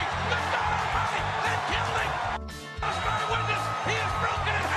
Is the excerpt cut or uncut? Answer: uncut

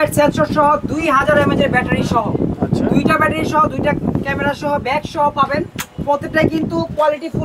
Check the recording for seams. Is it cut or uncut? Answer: uncut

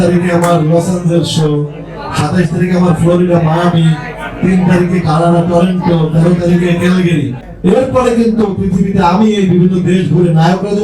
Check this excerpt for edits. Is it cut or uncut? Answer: cut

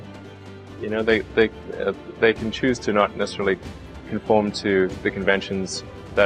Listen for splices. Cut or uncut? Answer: uncut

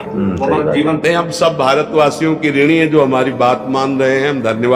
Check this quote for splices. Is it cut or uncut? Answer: uncut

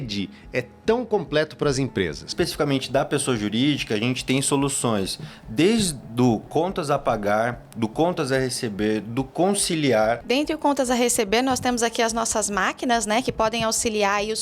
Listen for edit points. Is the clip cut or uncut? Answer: cut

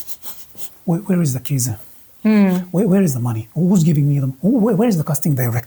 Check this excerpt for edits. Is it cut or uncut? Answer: uncut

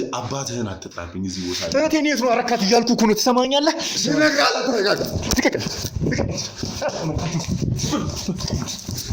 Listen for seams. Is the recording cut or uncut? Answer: uncut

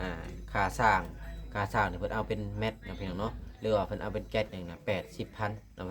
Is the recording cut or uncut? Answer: cut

